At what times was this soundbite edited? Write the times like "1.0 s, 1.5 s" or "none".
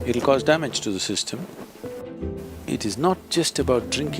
2.0 s